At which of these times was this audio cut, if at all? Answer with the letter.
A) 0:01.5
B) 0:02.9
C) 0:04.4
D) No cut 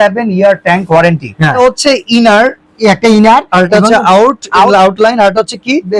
A